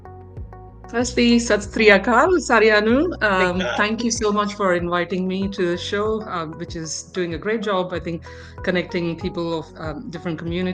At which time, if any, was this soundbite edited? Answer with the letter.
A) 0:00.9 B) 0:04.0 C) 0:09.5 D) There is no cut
A